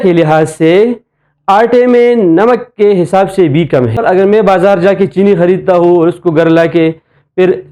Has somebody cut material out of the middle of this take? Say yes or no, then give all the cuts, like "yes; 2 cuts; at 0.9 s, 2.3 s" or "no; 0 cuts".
yes; 1 cut; at 4.0 s